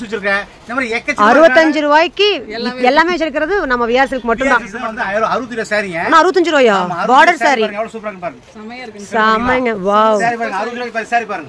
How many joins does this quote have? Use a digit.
1